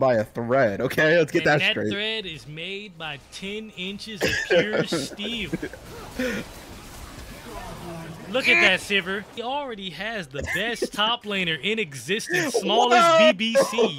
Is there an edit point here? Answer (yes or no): yes